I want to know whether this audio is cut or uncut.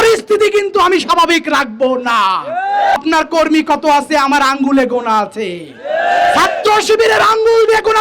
cut